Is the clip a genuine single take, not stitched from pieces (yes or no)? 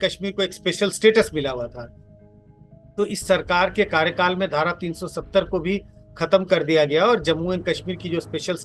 yes